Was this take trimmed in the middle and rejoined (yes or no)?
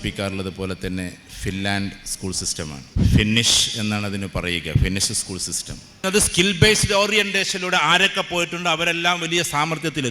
yes